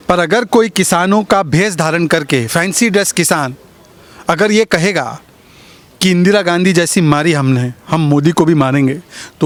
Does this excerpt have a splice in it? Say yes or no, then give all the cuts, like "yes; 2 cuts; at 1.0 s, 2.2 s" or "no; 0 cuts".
no; 0 cuts